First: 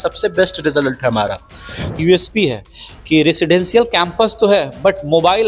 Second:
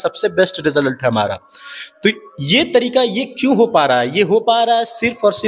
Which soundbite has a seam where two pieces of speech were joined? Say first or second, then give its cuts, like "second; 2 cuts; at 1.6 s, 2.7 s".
first; 1 cut; at 2.0 s